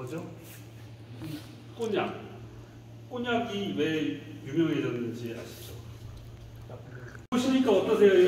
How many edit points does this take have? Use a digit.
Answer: 1